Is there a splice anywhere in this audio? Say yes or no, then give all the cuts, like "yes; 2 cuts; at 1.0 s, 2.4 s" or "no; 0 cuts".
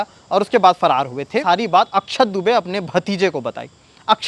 yes; 1 cut; at 1.4 s